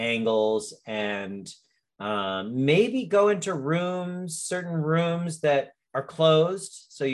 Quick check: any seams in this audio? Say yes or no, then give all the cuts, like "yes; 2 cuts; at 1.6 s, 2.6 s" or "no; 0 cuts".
yes; 1 cut; at 5.8 s